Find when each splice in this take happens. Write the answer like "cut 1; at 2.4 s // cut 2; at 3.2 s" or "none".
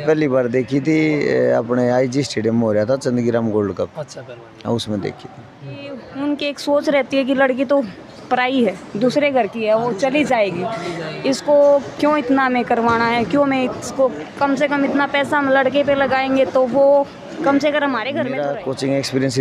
cut 1; at 6.0 s // cut 2; at 18.2 s